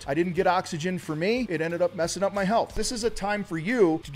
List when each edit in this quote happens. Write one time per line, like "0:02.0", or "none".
0:02.8